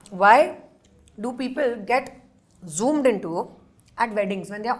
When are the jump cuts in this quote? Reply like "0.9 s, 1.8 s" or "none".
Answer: none